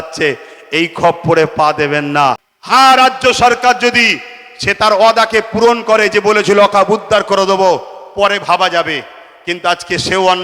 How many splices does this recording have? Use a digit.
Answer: 1